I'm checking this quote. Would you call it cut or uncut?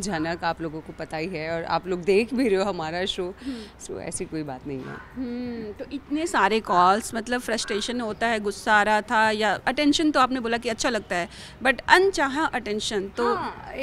uncut